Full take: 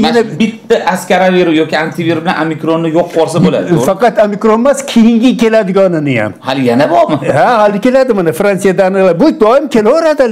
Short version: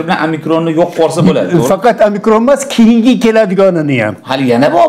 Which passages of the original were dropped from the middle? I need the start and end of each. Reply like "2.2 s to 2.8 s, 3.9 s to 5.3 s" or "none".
none

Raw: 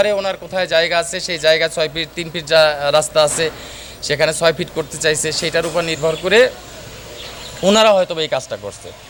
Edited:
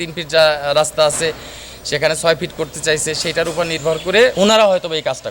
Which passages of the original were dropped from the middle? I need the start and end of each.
6.5 s to 7.6 s

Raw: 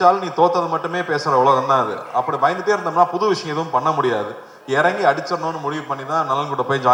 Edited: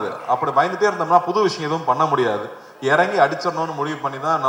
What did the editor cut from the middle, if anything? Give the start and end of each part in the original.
none

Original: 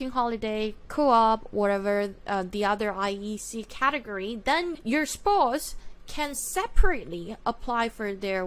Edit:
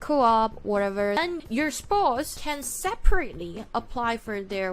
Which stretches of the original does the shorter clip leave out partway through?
2.1 s to 4.5 s, 5.7 s to 6.1 s

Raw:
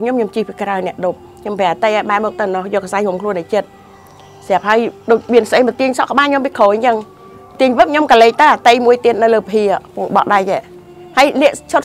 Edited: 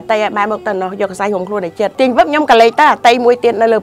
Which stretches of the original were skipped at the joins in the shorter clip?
3.7 s to 7.5 s

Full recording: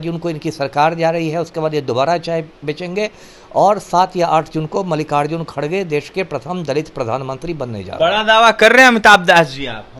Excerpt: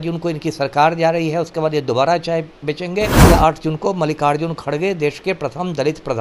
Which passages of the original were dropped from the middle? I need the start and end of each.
3.2 s to 4.1 s

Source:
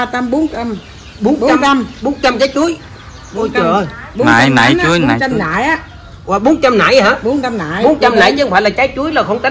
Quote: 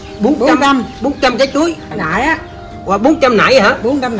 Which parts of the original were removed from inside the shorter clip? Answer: 3.0 s to 5.4 s

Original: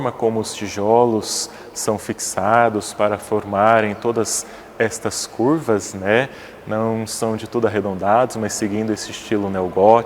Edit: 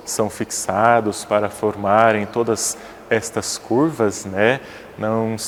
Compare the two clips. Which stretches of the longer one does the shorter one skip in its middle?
none

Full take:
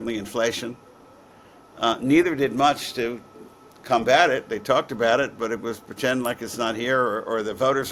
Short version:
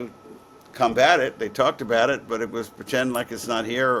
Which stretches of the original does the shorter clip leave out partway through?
none

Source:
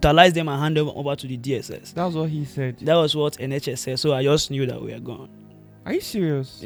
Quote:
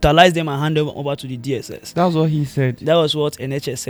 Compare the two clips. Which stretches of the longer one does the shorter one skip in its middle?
none

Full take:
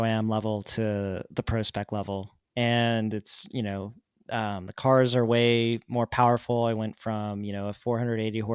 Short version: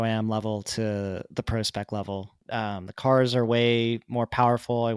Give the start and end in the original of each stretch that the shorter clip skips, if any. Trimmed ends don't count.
2.4 s to 4.2 s

